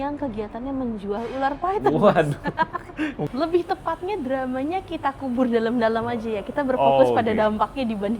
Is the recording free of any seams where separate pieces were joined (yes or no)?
no